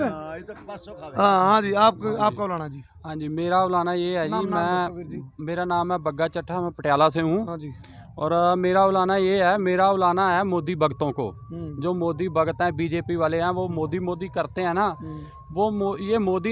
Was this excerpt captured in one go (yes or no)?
yes